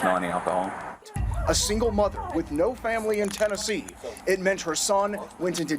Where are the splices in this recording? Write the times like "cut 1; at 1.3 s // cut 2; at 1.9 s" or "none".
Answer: cut 1; at 1.2 s